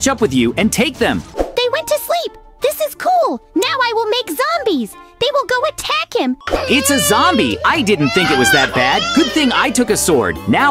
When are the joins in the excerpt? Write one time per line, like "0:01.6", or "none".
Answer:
0:01.2
0:06.5

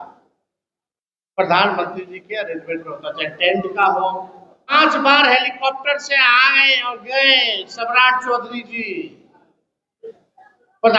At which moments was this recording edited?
0:04.7

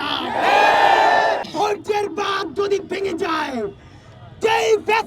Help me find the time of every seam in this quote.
0:01.5

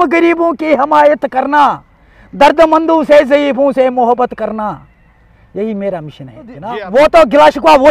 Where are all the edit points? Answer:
0:06.6

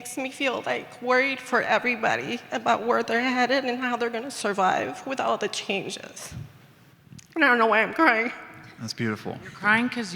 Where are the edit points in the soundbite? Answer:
none

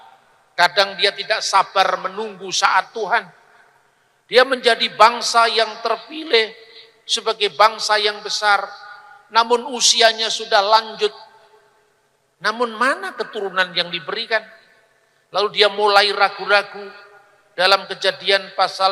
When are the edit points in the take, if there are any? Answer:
none

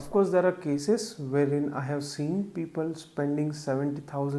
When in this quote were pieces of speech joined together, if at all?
none

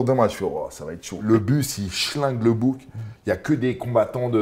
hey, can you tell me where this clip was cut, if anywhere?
0:01.1

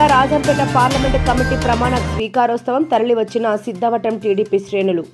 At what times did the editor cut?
none

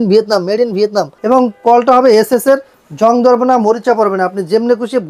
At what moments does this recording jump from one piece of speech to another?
0:01.1

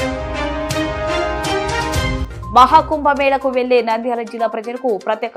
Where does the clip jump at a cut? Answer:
0:02.2

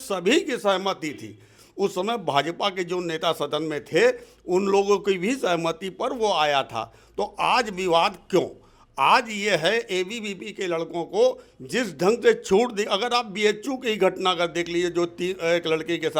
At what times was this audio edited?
none

